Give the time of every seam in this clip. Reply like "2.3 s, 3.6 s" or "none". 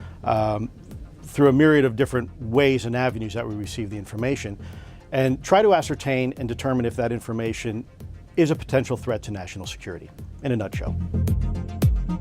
11.0 s